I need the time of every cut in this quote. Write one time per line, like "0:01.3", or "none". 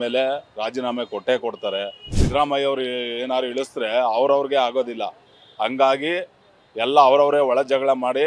0:02.1